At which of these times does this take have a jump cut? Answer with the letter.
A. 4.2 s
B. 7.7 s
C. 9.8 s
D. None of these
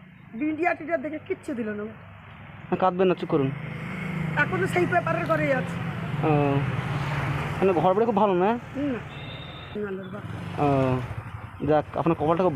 C